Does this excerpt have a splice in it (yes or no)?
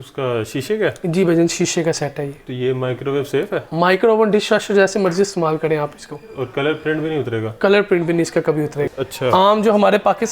yes